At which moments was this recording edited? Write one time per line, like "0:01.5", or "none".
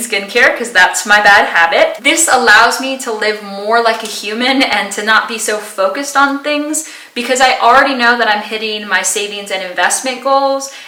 none